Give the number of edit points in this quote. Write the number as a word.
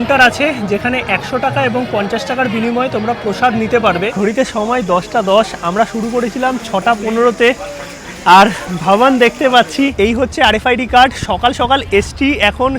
two